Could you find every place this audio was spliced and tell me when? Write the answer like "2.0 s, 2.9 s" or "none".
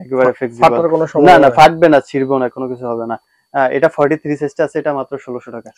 none